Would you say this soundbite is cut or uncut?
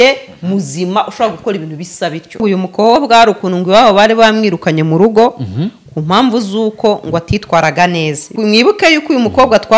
cut